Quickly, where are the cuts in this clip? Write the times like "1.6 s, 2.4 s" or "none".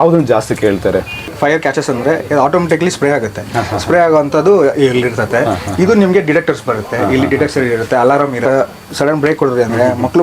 1.3 s, 8.4 s